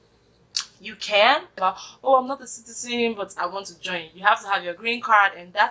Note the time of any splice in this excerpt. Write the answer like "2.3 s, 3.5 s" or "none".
1.5 s